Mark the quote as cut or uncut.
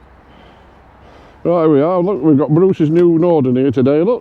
uncut